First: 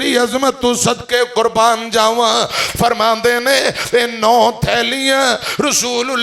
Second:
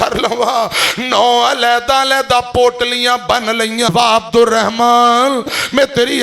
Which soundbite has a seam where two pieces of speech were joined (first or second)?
second